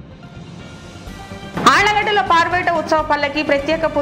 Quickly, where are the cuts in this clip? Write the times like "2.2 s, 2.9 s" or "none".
1.1 s